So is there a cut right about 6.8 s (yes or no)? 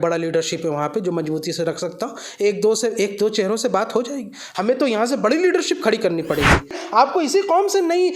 yes